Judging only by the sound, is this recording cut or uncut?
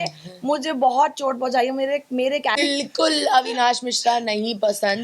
cut